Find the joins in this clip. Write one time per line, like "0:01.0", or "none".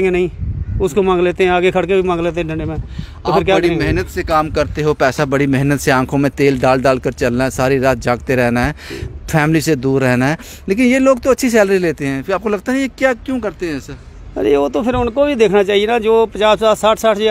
none